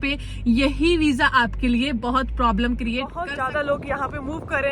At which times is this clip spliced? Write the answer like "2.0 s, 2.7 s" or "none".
3.2 s